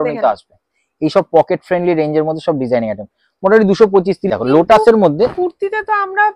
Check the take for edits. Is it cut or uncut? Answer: cut